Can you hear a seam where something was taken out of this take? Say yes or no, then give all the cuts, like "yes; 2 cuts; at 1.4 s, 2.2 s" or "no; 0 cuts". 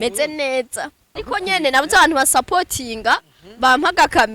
yes; 1 cut; at 1.1 s